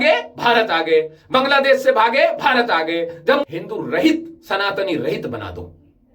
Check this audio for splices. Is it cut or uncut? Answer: cut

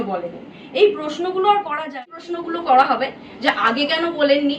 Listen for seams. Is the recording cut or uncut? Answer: cut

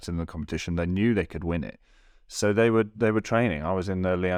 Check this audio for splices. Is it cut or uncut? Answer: uncut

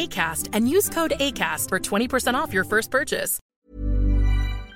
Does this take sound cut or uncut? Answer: cut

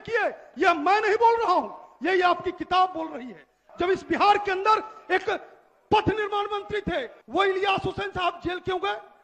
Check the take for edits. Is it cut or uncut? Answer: cut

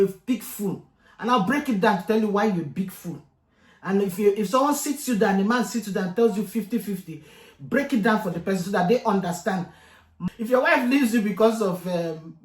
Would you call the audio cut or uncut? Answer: cut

